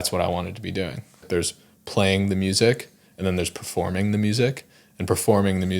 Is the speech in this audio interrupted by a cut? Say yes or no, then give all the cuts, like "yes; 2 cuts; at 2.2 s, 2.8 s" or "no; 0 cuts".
yes; 1 cut; at 1.2 s